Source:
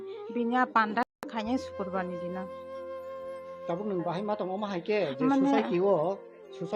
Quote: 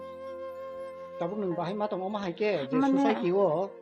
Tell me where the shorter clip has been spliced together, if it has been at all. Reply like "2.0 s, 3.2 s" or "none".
none

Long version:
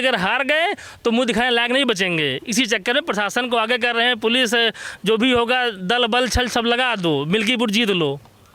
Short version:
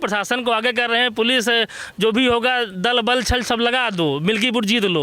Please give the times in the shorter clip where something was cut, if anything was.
none

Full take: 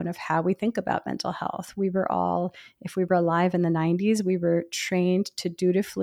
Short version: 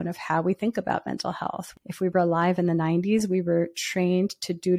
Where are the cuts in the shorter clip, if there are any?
1.7 s

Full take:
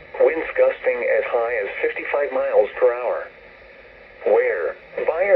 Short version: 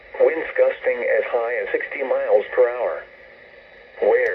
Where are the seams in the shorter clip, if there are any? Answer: 2.1 s

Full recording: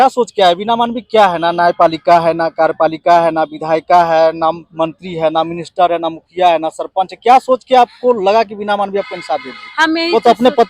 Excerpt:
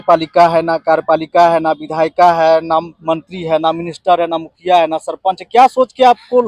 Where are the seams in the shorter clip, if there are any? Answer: none

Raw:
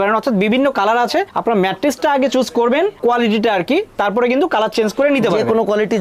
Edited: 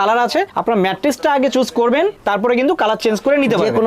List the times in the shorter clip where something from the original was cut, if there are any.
2.2 s

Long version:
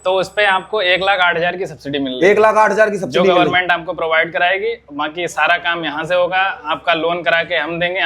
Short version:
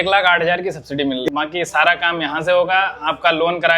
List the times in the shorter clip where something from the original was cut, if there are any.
1.2 s

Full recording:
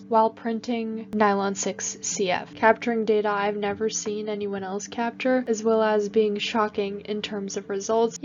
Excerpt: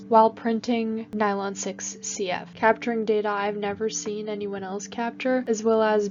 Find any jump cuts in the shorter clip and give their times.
none

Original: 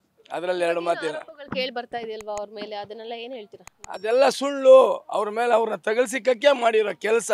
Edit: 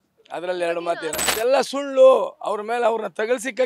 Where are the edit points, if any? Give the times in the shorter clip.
1.2 s

